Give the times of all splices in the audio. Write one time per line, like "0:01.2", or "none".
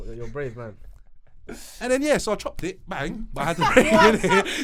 none